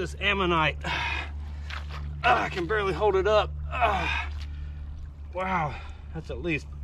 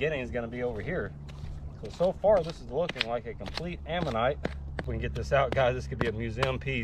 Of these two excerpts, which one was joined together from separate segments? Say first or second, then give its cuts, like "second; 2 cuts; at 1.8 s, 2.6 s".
second; 1 cut; at 4.9 s